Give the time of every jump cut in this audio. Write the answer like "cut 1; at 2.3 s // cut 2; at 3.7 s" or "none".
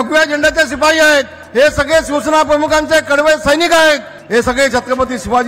cut 1; at 1.4 s // cut 2; at 4.1 s